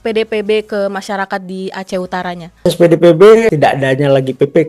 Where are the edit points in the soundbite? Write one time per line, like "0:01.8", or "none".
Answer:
0:02.6
0:03.5